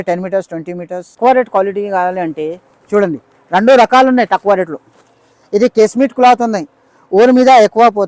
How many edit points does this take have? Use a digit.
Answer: 1